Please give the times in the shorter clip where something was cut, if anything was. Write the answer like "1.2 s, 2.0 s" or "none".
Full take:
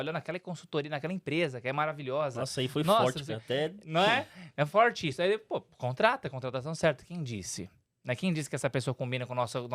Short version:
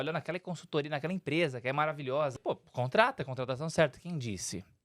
2.4 s